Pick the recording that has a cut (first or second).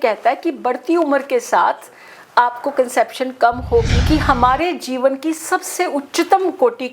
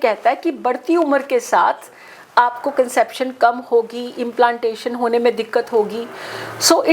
first